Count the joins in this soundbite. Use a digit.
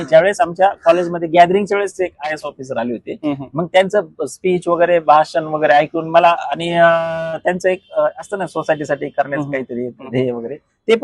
0